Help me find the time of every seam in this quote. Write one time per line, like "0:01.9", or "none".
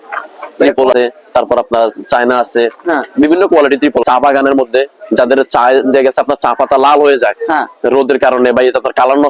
0:00.9
0:04.0